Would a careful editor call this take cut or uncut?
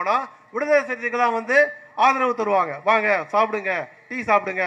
uncut